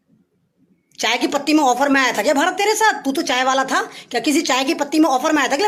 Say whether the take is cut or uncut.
uncut